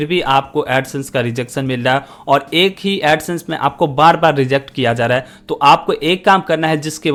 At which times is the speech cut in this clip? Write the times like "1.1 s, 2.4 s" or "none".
none